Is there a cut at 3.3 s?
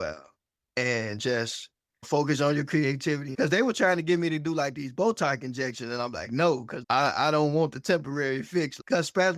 yes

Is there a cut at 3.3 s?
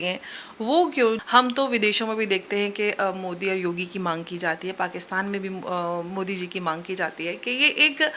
no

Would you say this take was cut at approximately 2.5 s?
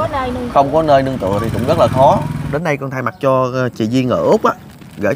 yes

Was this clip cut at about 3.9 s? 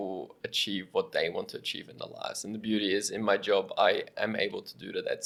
no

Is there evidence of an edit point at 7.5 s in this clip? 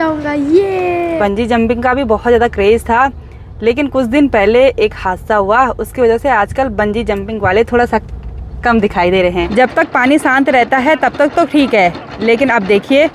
no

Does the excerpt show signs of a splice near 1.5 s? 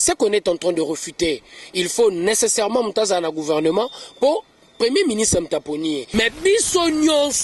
no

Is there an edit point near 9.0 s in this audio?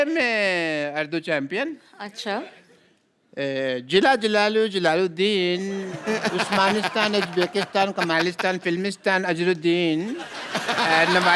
no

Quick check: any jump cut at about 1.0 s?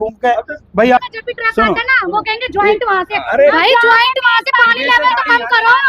yes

